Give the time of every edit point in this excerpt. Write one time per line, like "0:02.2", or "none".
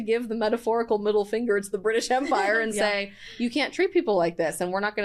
none